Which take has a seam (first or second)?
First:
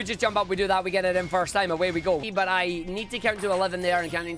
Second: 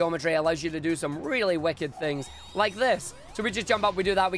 first